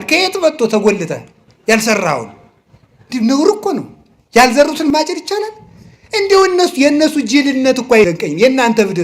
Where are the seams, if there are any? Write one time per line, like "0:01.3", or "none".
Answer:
0:04.9